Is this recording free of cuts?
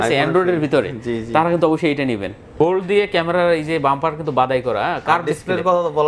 no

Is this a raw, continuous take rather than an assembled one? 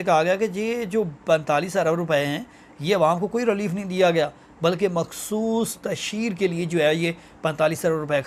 yes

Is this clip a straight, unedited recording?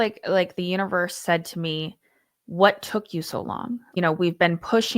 no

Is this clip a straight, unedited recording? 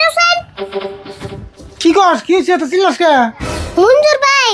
yes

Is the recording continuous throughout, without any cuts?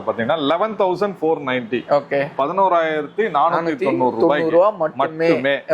yes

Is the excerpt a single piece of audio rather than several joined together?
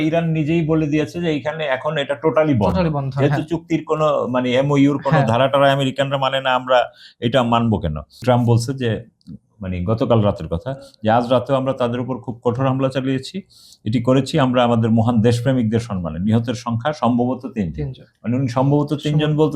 no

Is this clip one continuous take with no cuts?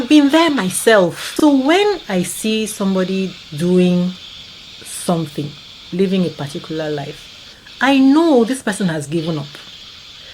no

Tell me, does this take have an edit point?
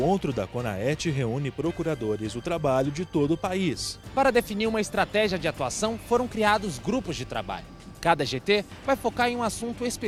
yes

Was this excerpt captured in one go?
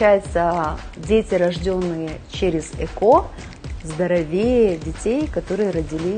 yes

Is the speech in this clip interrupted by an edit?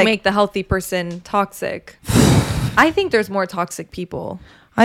yes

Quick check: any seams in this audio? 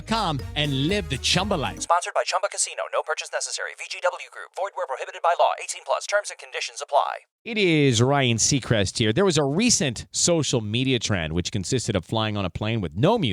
yes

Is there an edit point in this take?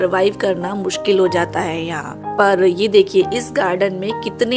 no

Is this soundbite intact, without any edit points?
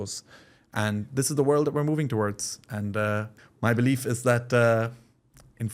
no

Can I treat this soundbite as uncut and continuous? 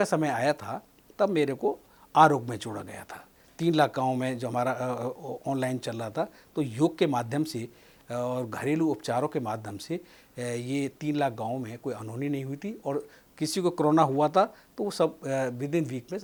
yes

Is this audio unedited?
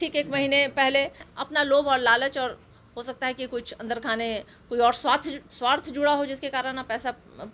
no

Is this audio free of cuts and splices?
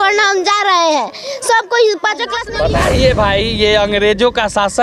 no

